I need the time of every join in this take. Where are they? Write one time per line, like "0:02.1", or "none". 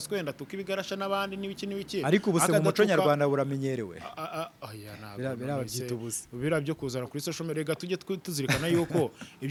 none